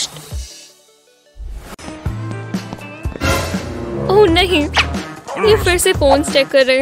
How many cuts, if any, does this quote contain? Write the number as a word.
one